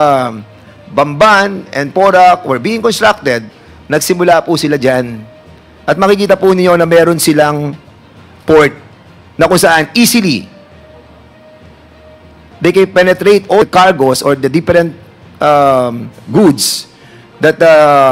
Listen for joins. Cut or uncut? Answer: cut